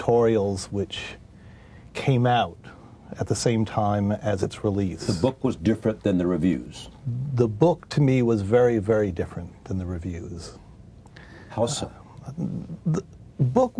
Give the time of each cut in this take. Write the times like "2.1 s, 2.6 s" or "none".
5.5 s